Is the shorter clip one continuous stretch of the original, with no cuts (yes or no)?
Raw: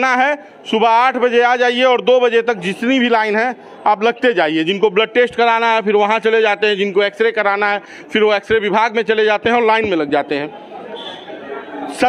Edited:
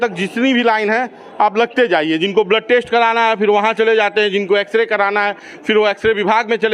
yes